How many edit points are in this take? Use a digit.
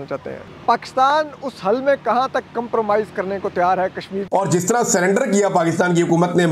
0